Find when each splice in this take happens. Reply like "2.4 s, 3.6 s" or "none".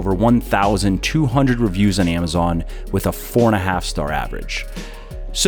none